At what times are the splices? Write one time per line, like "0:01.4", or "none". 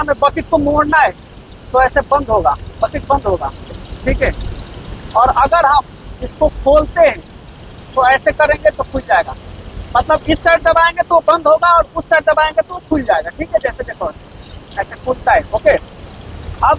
none